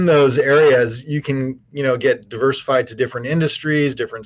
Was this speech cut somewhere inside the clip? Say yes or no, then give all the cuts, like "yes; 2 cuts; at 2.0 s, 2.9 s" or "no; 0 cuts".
no; 0 cuts